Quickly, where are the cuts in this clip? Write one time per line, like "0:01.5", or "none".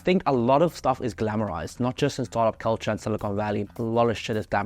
0:03.7